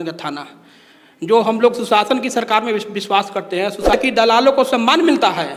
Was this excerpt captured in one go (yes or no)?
no